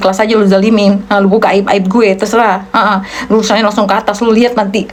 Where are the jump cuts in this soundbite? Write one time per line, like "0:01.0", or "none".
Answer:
none